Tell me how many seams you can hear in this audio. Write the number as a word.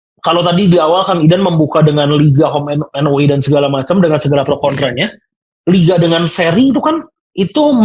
zero